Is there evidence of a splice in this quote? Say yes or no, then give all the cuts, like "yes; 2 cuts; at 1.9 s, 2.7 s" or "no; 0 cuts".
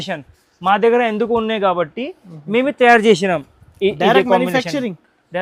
no; 0 cuts